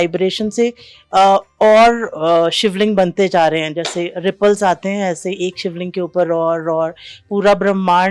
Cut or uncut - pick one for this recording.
uncut